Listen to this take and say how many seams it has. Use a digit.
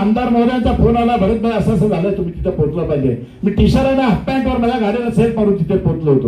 0